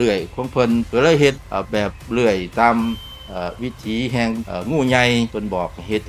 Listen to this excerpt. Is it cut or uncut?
uncut